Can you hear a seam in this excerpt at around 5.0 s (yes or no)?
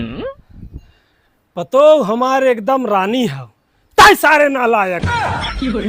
yes